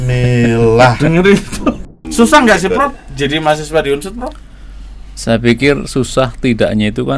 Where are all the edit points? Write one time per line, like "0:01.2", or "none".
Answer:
0:01.9